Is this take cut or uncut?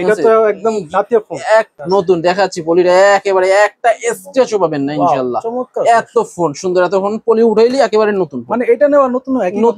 cut